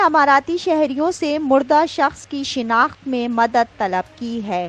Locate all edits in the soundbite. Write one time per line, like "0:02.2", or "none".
none